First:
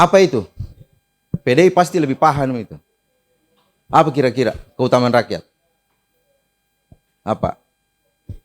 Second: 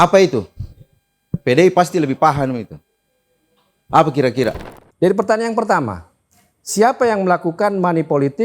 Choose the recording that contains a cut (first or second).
second